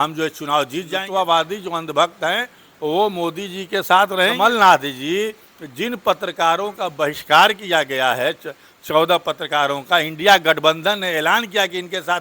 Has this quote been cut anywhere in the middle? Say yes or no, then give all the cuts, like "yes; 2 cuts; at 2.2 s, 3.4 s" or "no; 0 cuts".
yes; 2 cuts; at 1.0 s, 4.3 s